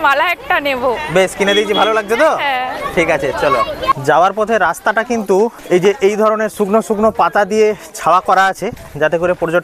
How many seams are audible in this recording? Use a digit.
0